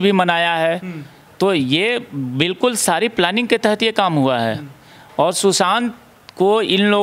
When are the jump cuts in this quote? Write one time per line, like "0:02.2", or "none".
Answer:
none